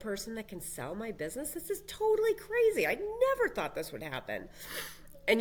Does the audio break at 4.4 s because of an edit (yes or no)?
no